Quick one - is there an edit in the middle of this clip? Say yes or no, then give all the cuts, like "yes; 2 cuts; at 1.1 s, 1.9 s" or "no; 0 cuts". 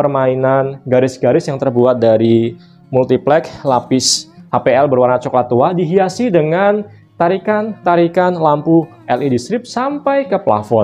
no; 0 cuts